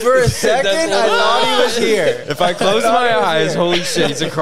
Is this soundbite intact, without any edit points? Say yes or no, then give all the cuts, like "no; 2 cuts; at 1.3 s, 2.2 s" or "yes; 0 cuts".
yes; 0 cuts